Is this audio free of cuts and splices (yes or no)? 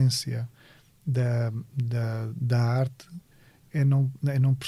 yes